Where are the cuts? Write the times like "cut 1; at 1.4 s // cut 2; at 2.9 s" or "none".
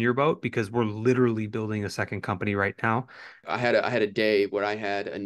cut 1; at 3.4 s